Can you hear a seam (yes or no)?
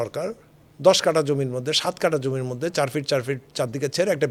no